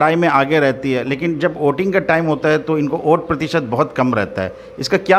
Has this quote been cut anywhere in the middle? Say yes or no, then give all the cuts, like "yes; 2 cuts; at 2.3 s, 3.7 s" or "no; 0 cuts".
no; 0 cuts